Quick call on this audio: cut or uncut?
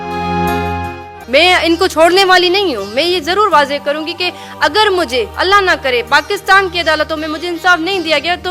cut